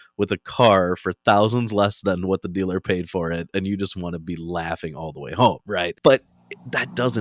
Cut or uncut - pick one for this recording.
cut